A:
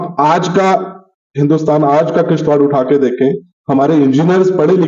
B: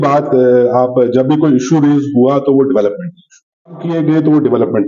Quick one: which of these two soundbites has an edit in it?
B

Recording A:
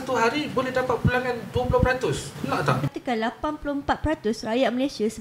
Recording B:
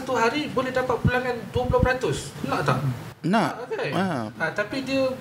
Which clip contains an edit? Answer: A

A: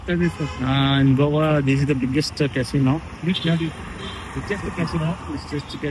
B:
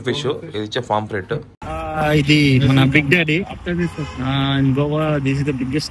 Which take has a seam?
B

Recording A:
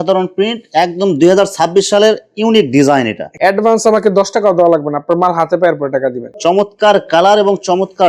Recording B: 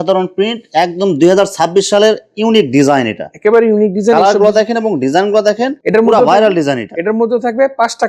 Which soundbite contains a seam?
A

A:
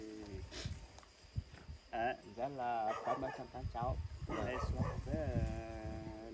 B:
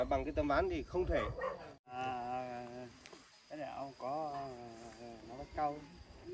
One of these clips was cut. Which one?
B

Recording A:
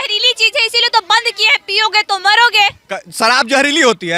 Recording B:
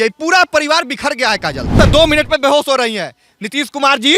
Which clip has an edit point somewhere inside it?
B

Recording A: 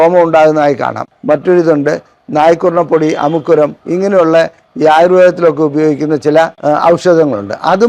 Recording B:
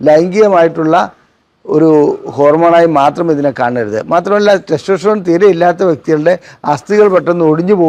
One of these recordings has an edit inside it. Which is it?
A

